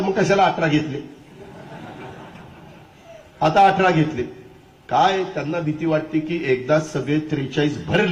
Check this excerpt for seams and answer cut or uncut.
uncut